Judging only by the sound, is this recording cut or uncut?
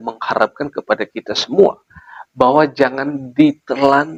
uncut